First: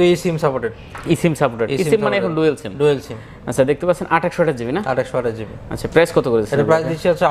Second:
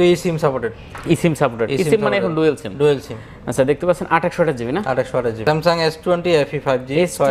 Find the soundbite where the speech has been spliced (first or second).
second